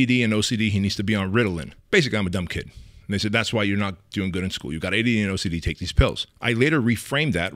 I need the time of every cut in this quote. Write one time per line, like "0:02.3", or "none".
0:01.7
0:06.3